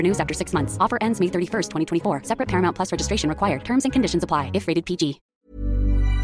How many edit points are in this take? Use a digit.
1